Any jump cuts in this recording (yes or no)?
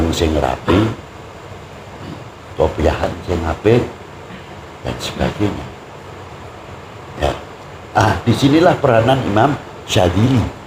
no